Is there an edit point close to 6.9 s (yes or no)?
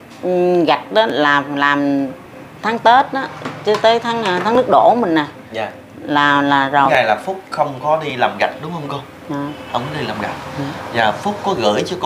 yes